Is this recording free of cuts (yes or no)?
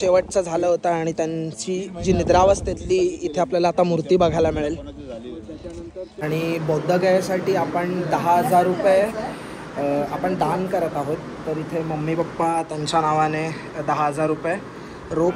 no